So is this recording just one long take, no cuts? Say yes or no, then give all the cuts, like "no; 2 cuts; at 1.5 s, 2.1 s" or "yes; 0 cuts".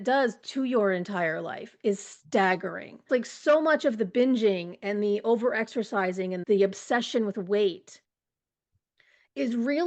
no; 1 cut; at 3.1 s